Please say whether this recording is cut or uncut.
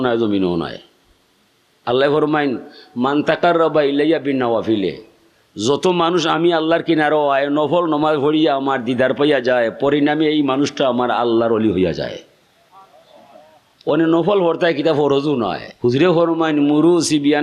cut